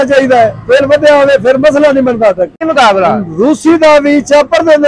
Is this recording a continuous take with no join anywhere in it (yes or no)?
no